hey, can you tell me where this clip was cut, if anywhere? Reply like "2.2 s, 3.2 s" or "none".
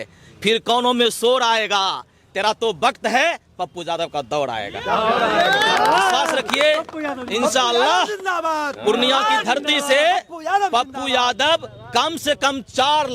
none